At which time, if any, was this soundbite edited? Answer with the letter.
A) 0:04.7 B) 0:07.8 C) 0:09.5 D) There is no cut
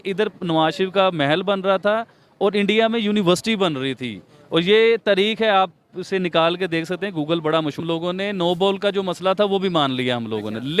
B